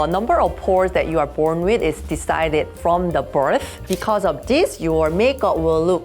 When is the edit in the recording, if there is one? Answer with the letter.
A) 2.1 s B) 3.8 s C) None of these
B